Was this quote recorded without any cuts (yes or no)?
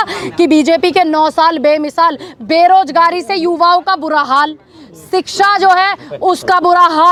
yes